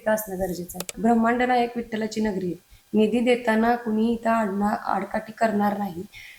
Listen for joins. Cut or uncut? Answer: cut